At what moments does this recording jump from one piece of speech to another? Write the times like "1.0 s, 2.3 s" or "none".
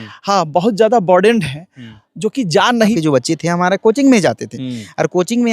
3.0 s